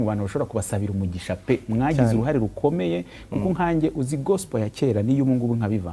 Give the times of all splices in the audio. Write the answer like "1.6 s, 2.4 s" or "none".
none